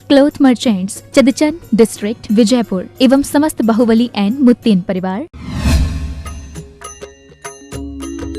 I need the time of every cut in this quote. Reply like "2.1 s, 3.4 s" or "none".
5.3 s

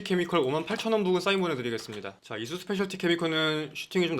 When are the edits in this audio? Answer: 2.2 s

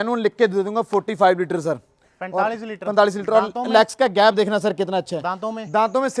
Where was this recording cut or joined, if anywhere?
none

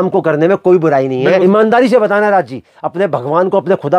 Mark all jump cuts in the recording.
1.4 s

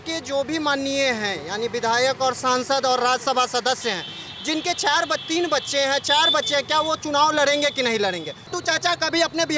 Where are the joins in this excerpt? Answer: 8.5 s

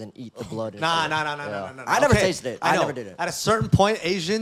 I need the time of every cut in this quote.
none

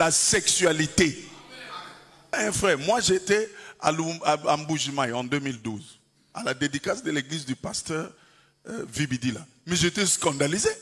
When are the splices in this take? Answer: 2.4 s

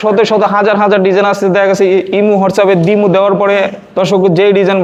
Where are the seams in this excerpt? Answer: none

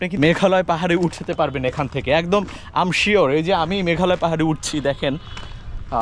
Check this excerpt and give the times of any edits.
none

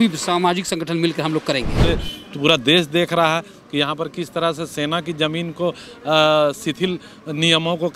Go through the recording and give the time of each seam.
1.8 s

